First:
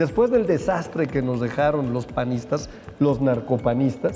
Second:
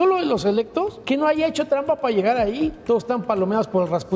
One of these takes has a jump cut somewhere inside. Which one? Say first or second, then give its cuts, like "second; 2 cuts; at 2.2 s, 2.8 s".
second; 2 cuts; at 1.0 s, 2.8 s